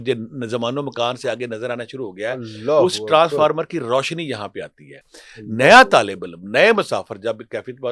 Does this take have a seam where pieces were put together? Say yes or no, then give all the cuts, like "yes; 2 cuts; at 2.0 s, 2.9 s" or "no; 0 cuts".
no; 0 cuts